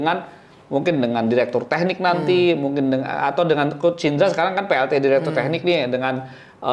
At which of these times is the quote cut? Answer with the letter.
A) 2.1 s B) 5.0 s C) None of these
C